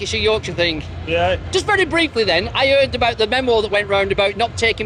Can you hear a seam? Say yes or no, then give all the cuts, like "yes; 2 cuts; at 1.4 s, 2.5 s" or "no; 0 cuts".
no; 0 cuts